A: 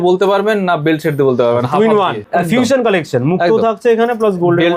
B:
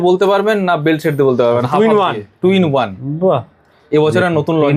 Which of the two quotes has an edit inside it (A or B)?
A